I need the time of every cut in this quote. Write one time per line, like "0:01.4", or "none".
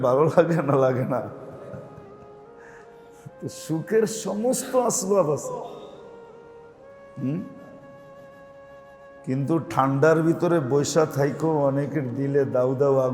0:01.9
0:03.4
0:07.8
0:09.2